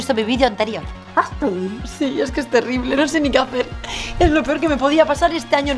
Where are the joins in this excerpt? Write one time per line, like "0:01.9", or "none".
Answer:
none